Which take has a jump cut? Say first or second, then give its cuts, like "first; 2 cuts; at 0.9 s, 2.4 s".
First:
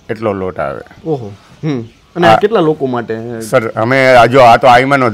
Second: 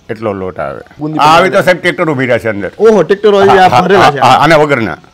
second; 1 cut; at 1.0 s